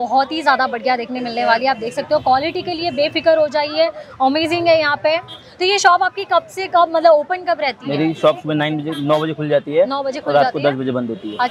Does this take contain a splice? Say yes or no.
no